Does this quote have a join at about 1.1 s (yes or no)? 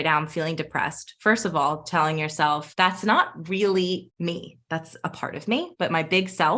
no